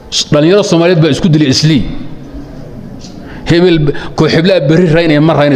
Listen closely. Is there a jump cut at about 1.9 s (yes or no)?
no